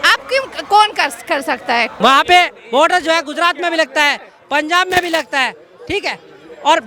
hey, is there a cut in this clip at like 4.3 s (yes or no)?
no